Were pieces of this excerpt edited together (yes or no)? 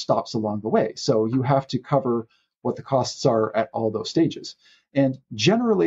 no